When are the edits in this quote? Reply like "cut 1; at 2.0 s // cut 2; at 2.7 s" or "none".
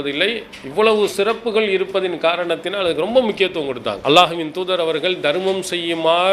cut 1; at 4.0 s

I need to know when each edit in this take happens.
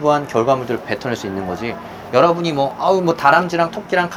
none

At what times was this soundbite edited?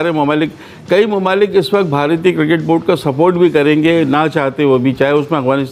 none

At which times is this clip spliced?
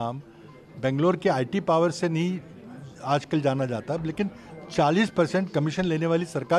none

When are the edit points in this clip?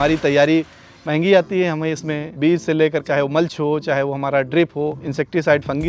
cut 1; at 2.2 s // cut 2; at 3.0 s // cut 3; at 5.0 s

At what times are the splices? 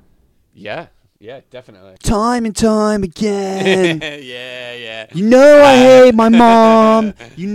cut 1; at 1.9 s

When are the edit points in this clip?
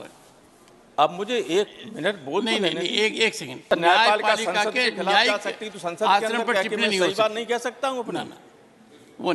cut 1; at 3.6 s

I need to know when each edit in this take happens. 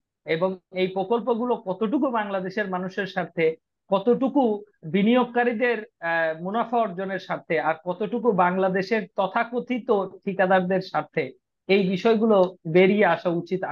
none

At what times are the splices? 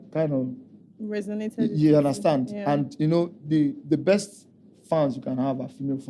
none

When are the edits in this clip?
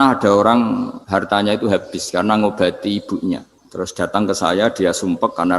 cut 1; at 1.0 s // cut 2; at 3.6 s

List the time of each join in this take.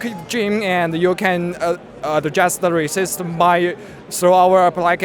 none

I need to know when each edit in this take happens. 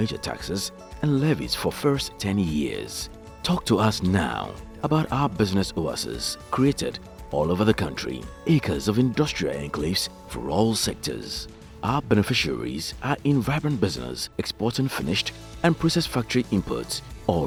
none

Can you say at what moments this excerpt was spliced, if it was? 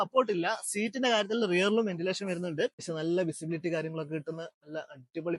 cut 1; at 2.9 s

